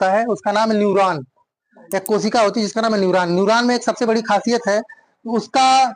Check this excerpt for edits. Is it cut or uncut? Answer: uncut